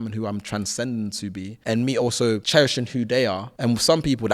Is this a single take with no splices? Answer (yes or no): no